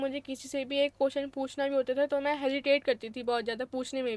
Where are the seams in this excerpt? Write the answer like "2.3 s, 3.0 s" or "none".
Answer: none